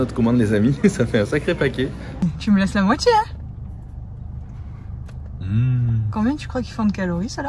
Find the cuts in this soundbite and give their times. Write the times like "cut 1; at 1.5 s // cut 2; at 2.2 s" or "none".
cut 1; at 2.2 s